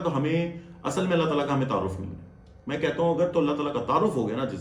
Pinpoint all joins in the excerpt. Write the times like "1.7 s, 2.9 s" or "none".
none